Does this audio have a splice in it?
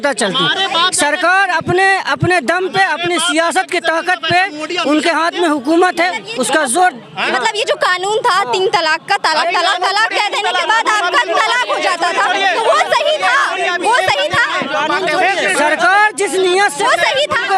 no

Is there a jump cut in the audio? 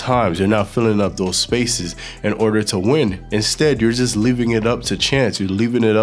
no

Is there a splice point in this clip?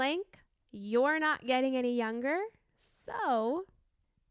no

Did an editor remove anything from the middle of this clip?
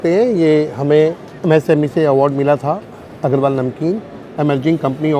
no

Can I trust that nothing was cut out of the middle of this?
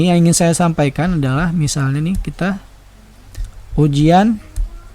yes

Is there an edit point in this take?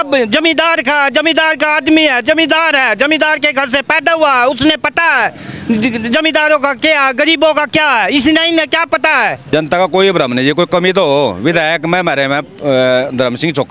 yes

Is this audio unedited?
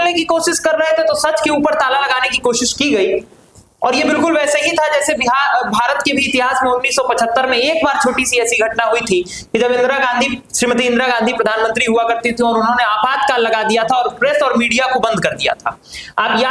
yes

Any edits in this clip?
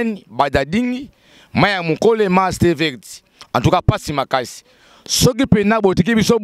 no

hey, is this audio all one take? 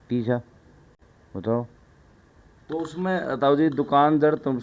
yes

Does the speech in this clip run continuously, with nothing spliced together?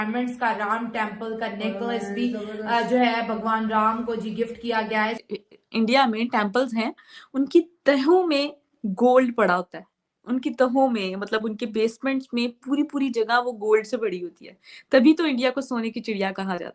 no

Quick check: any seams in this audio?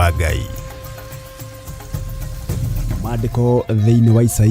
yes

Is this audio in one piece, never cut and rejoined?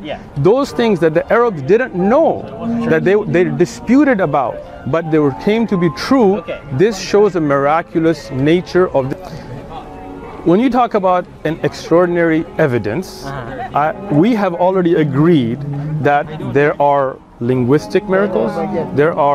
no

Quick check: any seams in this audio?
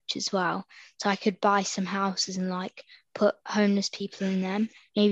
no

